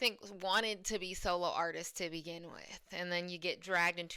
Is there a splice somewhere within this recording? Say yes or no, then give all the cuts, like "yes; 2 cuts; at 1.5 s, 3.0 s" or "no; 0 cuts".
no; 0 cuts